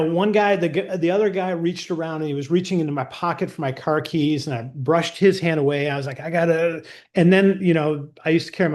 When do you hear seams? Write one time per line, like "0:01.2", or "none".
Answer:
0:06.9